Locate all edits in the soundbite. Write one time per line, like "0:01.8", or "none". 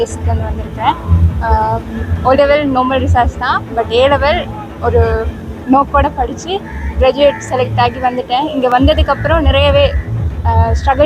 none

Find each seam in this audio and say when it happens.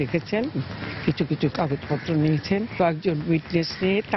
0:02.7

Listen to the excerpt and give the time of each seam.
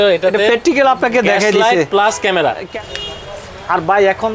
0:02.6

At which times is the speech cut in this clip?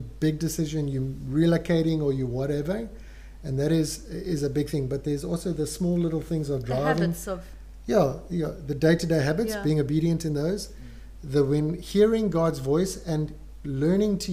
none

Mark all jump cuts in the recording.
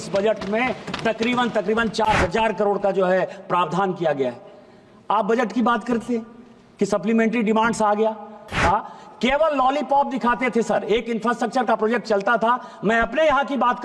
0:08.6

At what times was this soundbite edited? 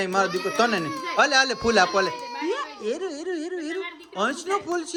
none

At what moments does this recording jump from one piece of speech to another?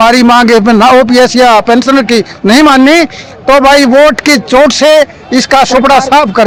none

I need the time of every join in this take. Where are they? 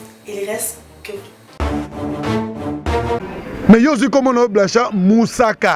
0:03.2

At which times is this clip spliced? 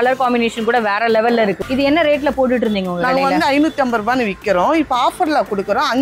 0:01.6

